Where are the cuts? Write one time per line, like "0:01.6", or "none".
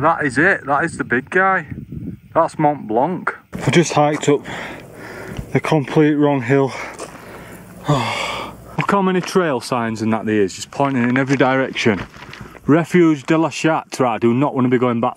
0:03.6
0:08.7

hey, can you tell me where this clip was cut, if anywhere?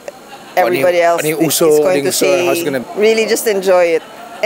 0:02.8

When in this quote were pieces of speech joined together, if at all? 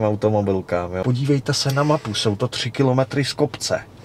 0:01.0

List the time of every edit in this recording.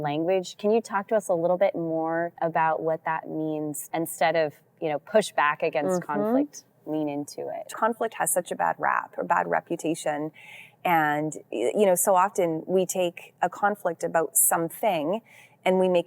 0:02.3
0:03.8
0:07.7

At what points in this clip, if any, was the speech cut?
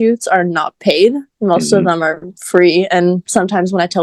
none

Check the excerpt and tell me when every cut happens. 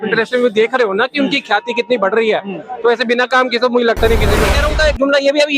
0:04.6

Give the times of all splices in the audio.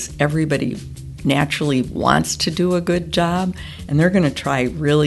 none

